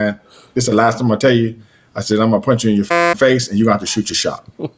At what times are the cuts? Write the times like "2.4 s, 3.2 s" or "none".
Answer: none